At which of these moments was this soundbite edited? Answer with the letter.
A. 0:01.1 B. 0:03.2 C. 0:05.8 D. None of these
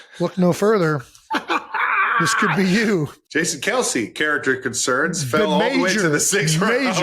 B